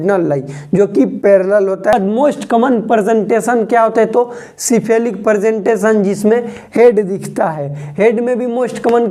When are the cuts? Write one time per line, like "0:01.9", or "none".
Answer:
0:01.9